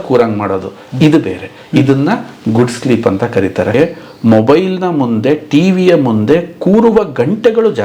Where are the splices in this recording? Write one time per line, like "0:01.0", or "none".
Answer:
0:03.7